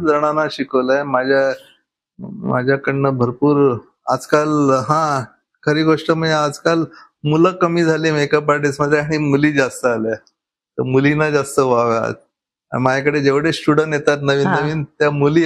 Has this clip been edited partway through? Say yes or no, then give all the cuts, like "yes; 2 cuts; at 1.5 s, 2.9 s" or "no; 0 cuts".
no; 0 cuts